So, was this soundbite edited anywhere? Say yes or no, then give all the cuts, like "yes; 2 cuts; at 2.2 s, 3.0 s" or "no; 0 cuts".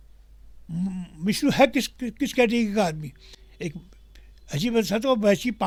no; 0 cuts